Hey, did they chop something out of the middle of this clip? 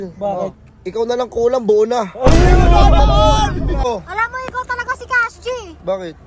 yes; 1 cut; at 3.8 s

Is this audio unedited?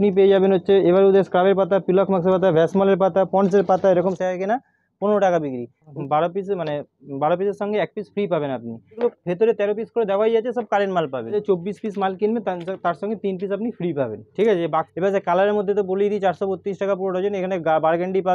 no; 5 cuts; at 4.1 s, 5.9 s, 9.0 s, 11.4 s, 14.9 s

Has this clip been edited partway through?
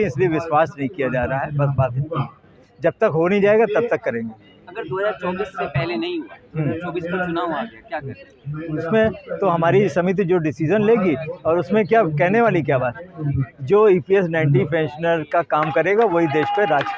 no; 0 cuts

